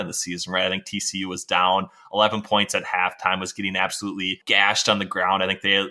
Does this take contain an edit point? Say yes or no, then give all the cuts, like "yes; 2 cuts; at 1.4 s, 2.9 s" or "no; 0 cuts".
yes; 1 cut; at 4.4 s